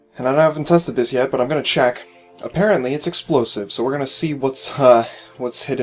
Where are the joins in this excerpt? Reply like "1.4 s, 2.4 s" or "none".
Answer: 4.4 s